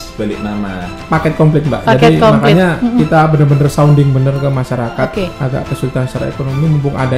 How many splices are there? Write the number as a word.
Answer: two